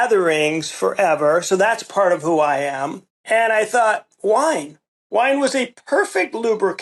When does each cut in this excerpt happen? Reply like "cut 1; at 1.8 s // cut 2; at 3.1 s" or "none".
cut 1; at 3.1 s